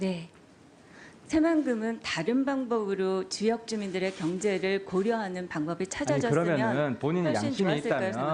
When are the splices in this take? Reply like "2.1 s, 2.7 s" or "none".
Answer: none

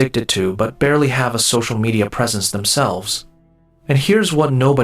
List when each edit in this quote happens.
2.7 s

